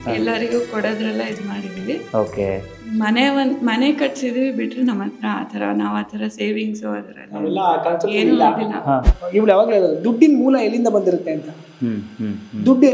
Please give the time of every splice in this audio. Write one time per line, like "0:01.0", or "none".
0:09.1